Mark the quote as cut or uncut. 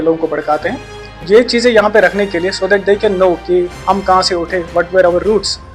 cut